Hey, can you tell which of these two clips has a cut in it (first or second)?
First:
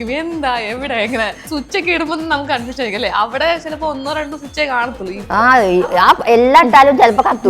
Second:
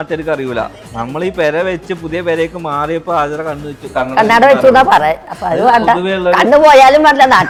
first